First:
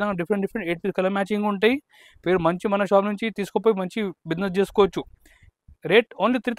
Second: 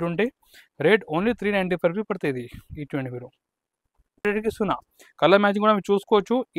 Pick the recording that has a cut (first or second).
second